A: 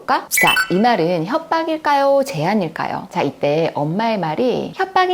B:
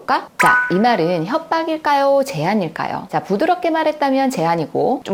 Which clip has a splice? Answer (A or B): A